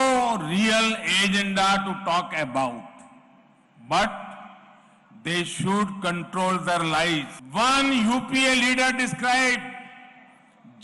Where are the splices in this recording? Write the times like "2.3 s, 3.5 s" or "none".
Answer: 7.4 s